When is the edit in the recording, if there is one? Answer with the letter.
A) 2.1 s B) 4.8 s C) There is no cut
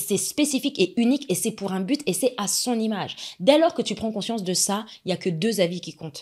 C